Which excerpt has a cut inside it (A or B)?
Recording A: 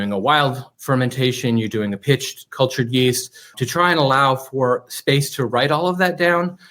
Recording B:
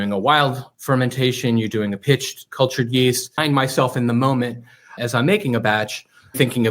B